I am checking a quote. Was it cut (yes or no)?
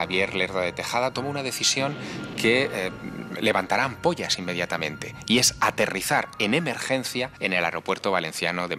yes